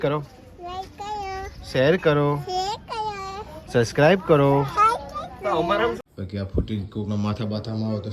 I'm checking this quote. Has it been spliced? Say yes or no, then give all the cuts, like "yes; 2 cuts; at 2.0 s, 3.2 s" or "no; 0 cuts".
yes; 1 cut; at 6.0 s